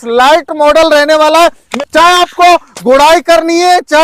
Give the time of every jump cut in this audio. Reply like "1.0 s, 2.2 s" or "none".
1.7 s